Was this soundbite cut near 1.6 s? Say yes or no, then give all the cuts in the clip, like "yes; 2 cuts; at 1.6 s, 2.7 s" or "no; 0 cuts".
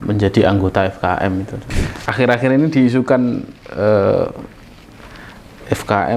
yes; 1 cut; at 1.6 s